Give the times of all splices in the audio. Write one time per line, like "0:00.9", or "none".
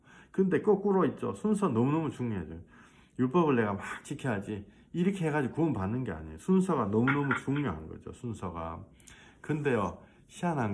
none